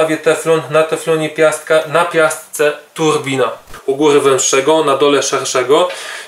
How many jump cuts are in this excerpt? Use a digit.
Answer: 1